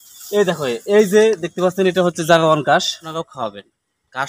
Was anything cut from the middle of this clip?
yes; 1 cut; at 3.2 s

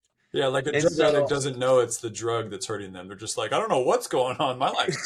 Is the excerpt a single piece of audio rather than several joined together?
yes; 0 cuts

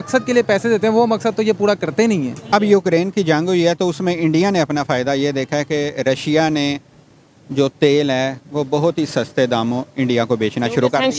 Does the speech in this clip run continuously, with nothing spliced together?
no; 1 cut; at 2.4 s

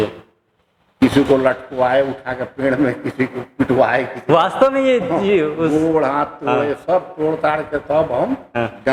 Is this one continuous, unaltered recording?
yes; 0 cuts

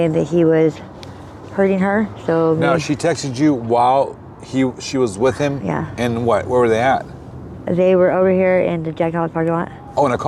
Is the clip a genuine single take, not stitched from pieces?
yes; 0 cuts

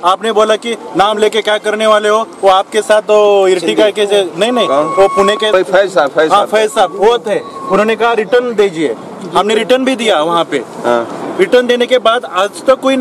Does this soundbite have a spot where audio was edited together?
no; 0 cuts

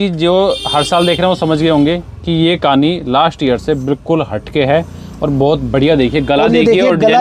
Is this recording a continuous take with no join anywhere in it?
yes; 0 cuts

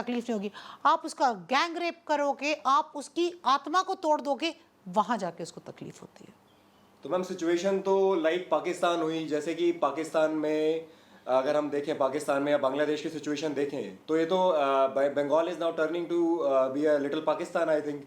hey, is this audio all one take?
yes; 0 cuts

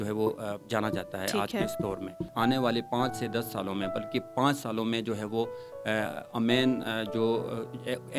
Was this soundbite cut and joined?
yes; 1 cut; at 2.3 s

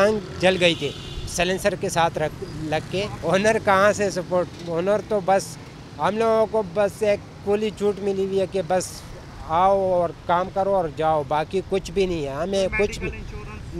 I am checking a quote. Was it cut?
no; 0 cuts

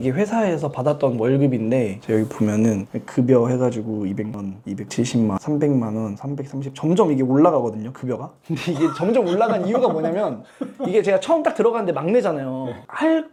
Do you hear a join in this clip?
no; 0 cuts

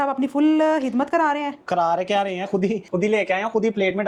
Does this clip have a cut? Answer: no; 0 cuts

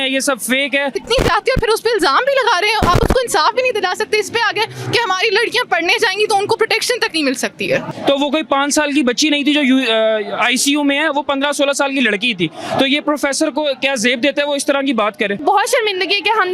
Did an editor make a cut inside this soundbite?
yes; 3 cuts; at 1.0 s, 7.9 s, 15.4 s

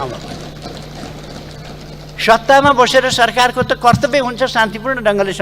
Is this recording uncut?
yes; 0 cuts

